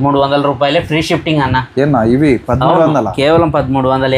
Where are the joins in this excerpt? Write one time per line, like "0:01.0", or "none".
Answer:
none